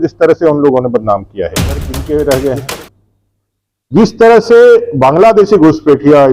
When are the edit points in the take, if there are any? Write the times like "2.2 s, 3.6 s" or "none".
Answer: 1.9 s